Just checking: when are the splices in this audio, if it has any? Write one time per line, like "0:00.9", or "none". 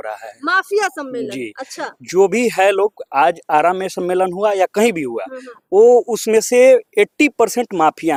none